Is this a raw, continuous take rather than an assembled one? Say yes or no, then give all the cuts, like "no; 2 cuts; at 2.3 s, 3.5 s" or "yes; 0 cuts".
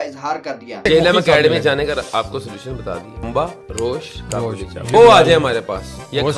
no; 3 cuts; at 0.8 s, 3.3 s, 4.9 s